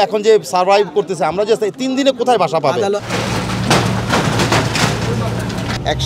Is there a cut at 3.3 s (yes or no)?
no